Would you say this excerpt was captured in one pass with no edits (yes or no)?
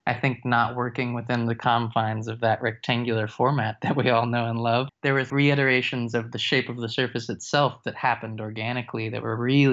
no